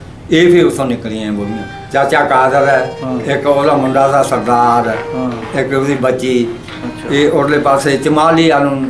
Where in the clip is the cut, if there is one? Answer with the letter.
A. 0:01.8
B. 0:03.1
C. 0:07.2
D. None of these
A